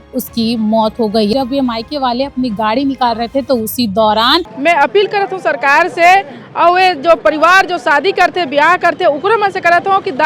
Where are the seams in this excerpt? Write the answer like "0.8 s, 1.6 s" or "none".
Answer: 1.3 s, 4.5 s